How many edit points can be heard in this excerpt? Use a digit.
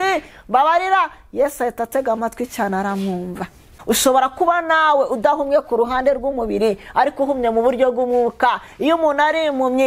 1